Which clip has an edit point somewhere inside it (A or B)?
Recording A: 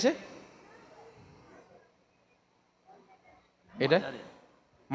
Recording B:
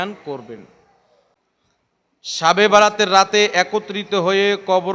B